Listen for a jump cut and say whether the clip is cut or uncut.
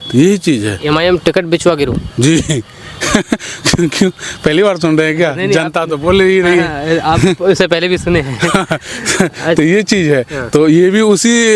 uncut